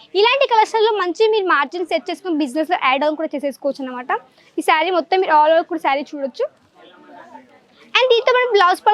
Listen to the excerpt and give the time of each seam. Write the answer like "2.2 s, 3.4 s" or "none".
none